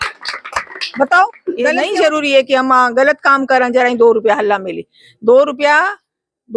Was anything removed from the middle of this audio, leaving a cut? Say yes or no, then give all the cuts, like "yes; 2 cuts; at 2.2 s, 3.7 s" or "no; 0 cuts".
yes; 1 cut; at 1.8 s